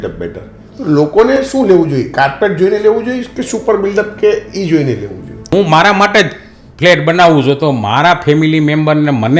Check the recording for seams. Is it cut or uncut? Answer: cut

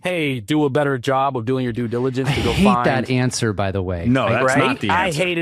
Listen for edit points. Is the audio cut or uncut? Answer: uncut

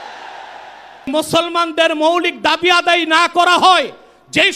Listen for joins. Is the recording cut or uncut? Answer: cut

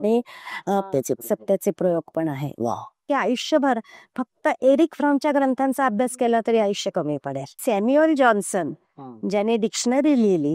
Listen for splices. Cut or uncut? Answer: cut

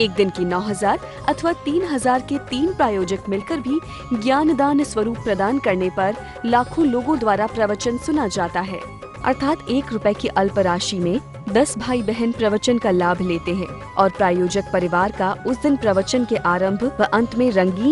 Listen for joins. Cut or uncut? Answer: uncut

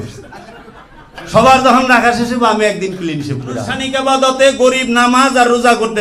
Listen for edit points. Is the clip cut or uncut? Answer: cut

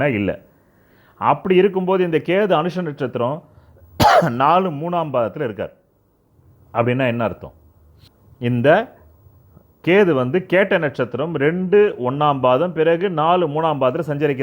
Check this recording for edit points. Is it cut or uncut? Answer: uncut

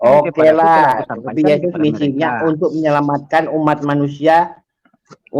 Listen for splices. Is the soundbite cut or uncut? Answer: uncut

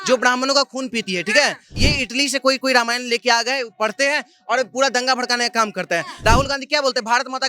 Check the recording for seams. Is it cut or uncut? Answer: cut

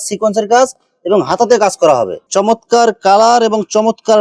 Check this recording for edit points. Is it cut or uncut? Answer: cut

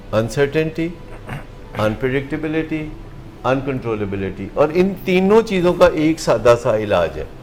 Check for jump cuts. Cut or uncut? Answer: uncut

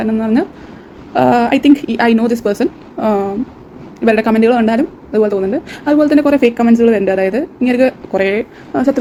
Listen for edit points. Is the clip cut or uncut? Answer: uncut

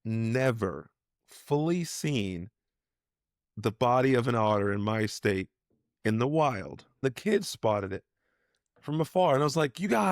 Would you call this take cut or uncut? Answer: cut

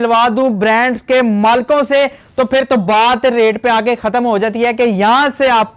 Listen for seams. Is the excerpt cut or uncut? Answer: uncut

